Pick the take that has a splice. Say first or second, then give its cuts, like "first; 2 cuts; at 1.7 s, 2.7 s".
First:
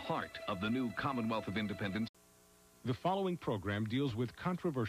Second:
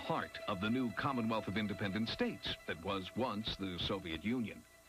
second; 1 cut; at 2.1 s